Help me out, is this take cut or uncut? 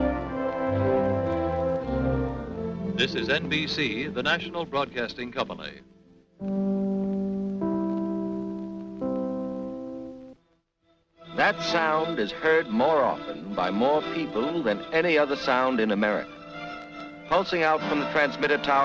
uncut